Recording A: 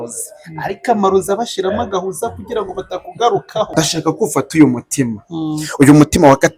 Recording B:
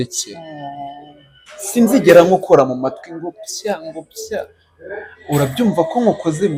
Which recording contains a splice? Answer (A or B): A